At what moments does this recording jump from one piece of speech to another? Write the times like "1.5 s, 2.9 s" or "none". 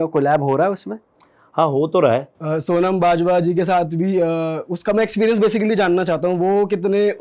2.3 s